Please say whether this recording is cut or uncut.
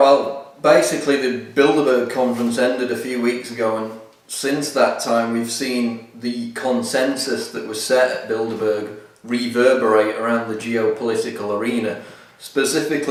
uncut